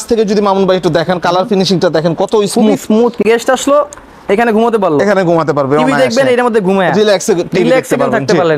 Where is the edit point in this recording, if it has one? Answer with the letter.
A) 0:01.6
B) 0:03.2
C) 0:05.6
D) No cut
B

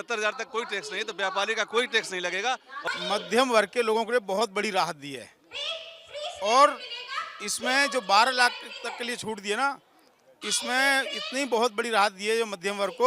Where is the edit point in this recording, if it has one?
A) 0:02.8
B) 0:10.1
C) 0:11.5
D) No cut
A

